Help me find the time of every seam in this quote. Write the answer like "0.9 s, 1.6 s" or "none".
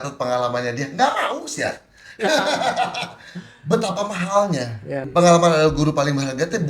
5.0 s